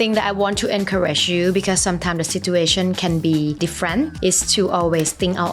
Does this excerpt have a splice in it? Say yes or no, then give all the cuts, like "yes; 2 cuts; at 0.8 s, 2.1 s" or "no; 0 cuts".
yes; 1 cut; at 3.8 s